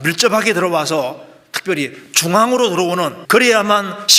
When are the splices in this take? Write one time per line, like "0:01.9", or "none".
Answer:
0:03.2